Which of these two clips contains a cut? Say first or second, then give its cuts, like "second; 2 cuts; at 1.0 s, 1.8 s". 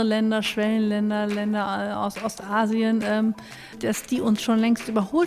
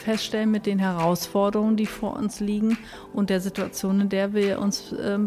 first; 1 cut; at 3.8 s